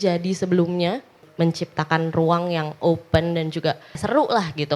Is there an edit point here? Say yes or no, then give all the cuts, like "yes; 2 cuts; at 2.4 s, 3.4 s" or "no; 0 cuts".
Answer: yes; 2 cuts; at 1.2 s, 4.0 s